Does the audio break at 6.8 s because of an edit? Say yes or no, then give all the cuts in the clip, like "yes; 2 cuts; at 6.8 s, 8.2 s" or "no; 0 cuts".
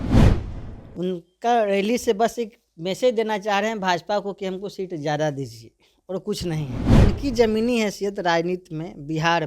yes; 1 cut; at 6.8 s